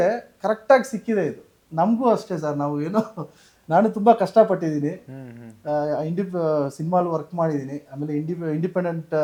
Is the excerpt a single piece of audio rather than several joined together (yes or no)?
yes